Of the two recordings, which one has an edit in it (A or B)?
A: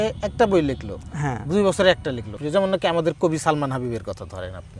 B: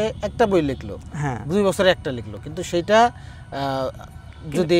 A